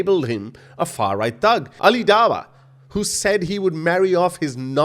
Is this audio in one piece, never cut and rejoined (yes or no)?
no